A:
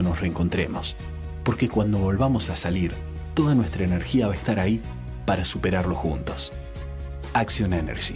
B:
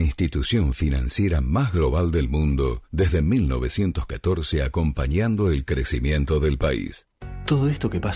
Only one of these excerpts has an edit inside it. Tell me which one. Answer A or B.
B